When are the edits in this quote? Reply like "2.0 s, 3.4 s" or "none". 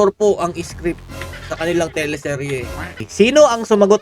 3.0 s